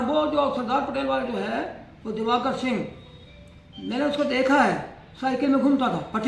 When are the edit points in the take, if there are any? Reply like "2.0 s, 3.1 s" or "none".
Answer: none